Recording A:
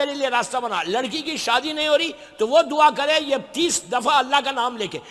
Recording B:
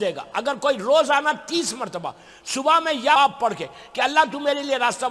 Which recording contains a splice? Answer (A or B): B